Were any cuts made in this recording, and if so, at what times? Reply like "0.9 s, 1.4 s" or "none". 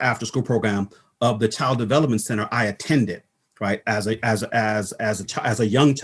none

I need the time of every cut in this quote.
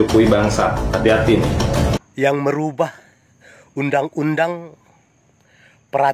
2.0 s

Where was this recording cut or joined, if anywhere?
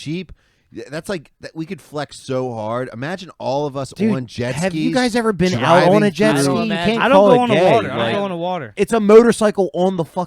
8.7 s

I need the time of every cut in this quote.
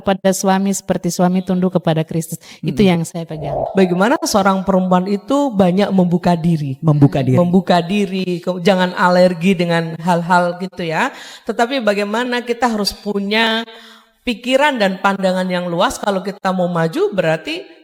3.6 s

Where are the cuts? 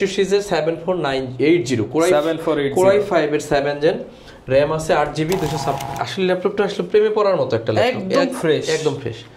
5.8 s

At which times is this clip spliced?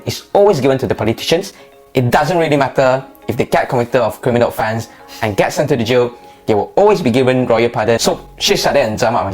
8.0 s

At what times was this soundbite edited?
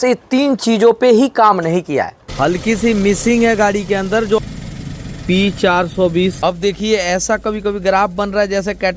2.2 s, 4.4 s, 6.4 s

